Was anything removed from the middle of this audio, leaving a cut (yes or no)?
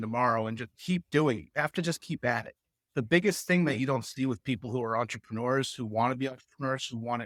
no